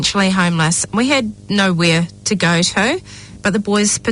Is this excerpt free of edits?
no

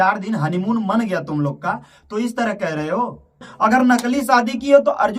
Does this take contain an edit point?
yes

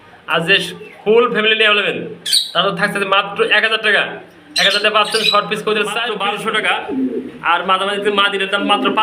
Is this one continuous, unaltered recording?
no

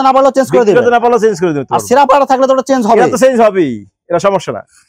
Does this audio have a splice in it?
no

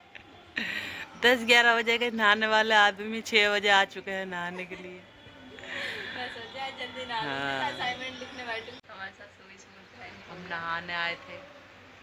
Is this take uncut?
yes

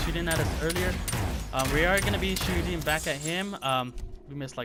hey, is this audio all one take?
yes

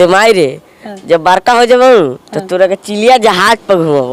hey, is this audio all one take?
yes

